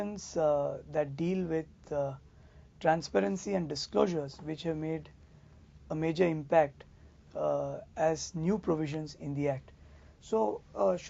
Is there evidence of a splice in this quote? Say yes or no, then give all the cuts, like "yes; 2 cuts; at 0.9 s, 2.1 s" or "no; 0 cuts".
no; 0 cuts